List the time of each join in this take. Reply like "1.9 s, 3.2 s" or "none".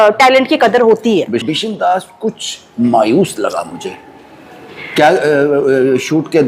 1.4 s